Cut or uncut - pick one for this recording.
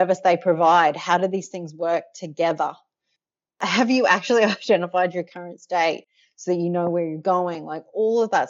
uncut